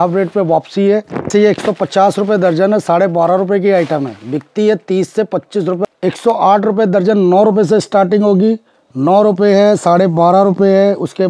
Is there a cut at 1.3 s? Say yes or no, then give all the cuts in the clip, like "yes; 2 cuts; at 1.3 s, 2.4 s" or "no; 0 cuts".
yes; 2 cuts; at 1.3 s, 5.8 s